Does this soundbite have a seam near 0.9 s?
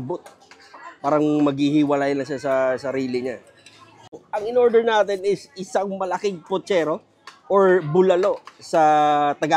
no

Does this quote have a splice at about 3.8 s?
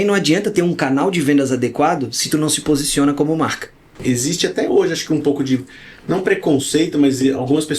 yes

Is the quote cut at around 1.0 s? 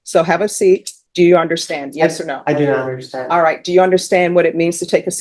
yes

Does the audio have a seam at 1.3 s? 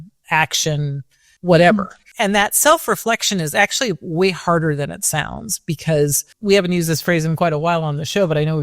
yes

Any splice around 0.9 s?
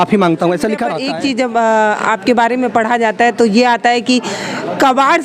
yes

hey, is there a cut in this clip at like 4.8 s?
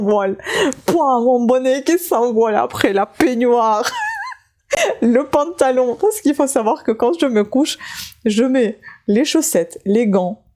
no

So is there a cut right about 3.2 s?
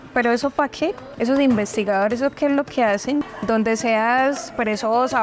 yes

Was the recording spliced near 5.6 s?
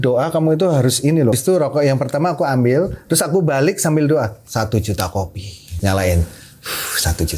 yes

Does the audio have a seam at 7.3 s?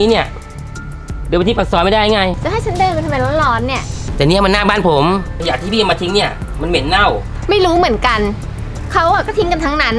yes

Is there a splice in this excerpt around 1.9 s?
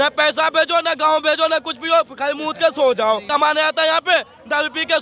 no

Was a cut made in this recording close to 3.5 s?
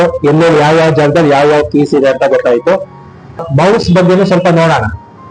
yes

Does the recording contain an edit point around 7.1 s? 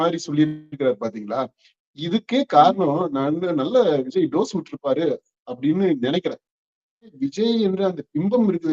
yes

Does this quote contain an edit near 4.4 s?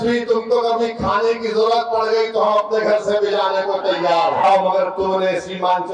yes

